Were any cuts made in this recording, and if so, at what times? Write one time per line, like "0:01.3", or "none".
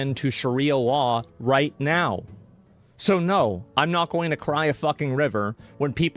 0:02.2